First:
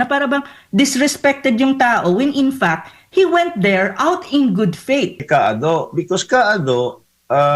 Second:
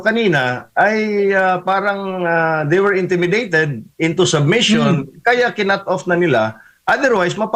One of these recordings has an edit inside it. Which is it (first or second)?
first